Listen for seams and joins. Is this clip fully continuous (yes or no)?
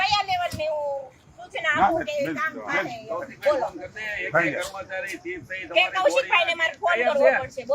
yes